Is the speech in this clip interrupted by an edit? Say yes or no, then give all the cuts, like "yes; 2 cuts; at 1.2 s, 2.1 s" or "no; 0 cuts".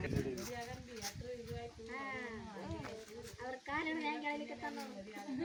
no; 0 cuts